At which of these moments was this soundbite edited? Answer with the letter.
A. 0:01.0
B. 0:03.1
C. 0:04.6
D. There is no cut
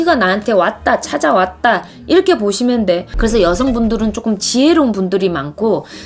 B